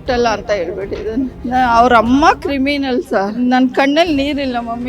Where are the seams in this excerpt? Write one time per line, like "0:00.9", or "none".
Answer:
0:01.4
0:03.3